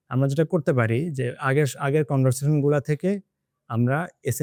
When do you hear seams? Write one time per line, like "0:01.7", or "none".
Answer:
none